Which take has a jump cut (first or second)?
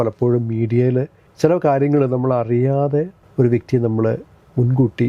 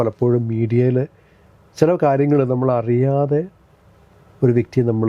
first